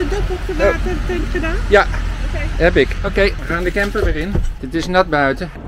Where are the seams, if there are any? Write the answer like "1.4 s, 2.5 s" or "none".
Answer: none